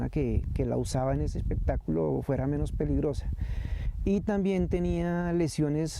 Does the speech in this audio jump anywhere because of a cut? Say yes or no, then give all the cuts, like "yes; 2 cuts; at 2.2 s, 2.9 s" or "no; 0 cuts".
no; 0 cuts